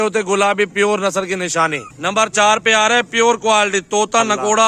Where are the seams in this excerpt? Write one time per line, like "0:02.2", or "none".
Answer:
none